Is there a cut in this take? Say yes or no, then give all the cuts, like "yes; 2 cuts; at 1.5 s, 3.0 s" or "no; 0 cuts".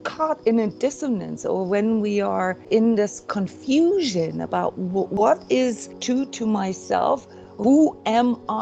yes; 4 cuts; at 2.7 s, 5.2 s, 5.9 s, 7.5 s